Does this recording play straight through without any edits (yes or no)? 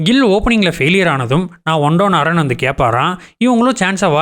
yes